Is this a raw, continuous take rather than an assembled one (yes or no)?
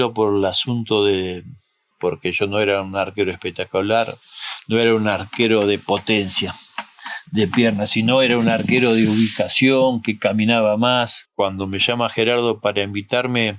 no